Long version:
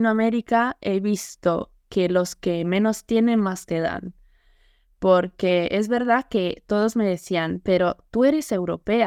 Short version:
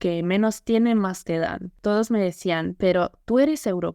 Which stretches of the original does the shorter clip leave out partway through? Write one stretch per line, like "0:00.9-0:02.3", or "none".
0:04.2-0:06.6